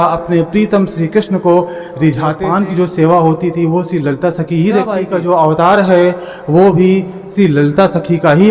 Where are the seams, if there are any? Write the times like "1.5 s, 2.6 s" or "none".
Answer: 2.4 s, 4.9 s